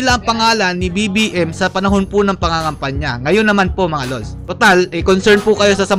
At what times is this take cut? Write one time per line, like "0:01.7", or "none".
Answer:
none